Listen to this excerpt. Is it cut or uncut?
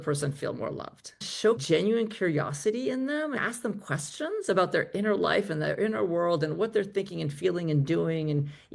cut